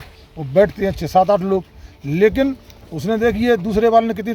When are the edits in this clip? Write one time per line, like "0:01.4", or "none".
none